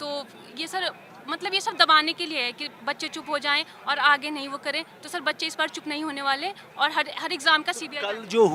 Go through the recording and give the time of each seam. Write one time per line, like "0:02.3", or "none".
none

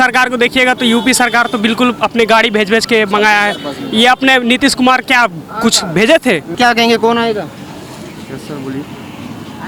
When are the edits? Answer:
none

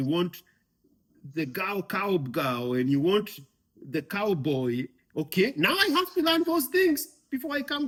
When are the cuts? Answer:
none

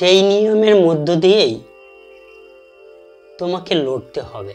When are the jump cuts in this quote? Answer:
none

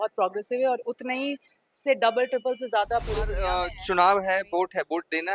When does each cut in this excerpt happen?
0:03.7

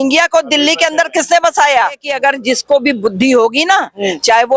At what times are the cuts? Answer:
0:02.1

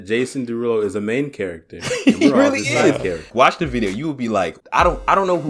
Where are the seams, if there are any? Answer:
0:03.3
0:04.6

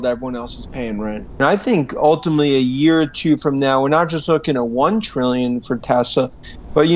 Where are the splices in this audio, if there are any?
0:01.2

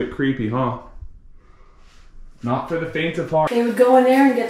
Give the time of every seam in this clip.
0:03.5

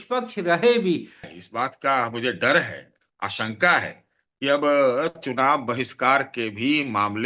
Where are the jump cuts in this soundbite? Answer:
0:01.2

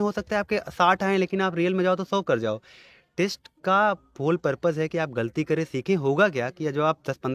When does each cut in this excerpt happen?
none

